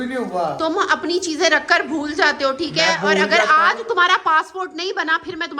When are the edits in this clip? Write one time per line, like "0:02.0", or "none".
none

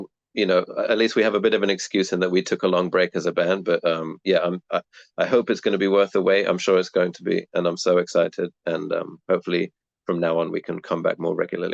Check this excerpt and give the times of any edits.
none

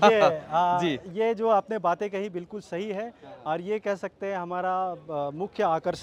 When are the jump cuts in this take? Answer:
none

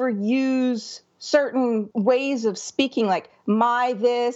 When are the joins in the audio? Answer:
0:01.9

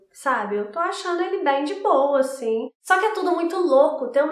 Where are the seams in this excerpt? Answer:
0:02.7

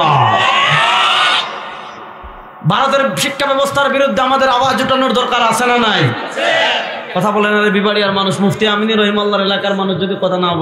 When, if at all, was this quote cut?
none

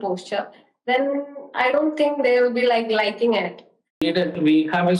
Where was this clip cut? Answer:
0:04.0

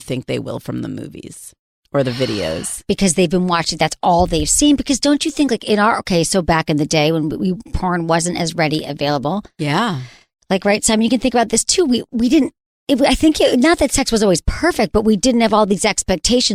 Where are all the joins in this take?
none

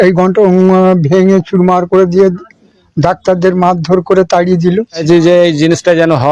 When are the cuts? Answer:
0:05.0

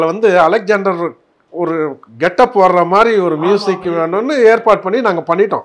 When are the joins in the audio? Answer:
none

